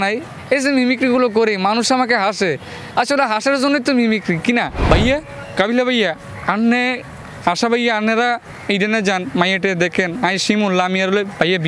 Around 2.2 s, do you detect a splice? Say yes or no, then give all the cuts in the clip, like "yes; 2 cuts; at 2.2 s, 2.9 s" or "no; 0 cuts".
no; 1 cut; at 4.8 s